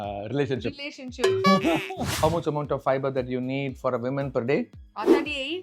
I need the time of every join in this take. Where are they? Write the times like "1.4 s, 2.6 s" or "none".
2.0 s